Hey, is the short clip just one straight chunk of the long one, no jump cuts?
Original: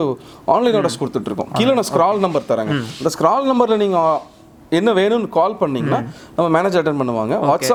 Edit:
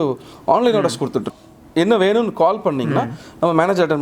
no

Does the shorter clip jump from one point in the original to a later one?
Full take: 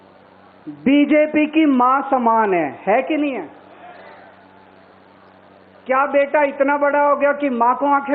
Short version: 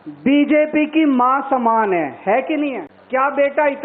yes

